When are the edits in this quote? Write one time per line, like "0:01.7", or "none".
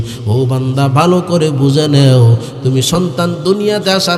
none